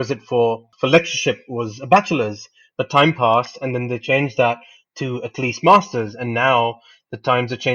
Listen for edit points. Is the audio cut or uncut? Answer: uncut